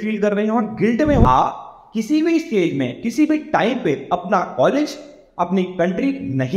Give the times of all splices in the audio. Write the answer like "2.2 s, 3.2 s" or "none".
1.2 s